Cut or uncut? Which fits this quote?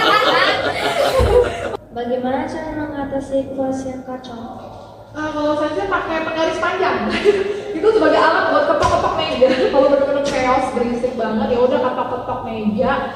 cut